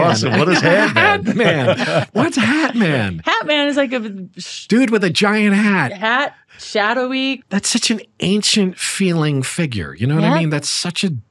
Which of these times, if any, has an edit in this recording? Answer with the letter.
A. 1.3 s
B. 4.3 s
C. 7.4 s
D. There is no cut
C